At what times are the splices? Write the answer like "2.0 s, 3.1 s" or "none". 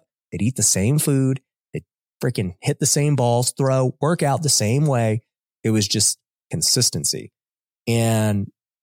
none